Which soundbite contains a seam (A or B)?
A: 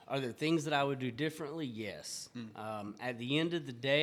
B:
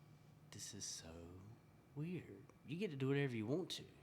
B